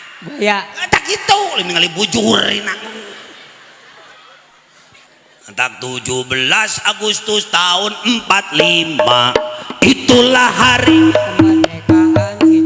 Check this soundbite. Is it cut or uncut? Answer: cut